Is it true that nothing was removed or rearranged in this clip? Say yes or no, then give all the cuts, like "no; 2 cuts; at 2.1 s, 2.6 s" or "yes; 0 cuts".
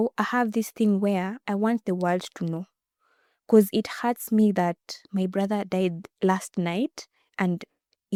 yes; 0 cuts